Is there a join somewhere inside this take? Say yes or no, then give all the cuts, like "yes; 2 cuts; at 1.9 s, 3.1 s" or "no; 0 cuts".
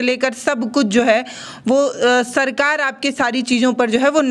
no; 0 cuts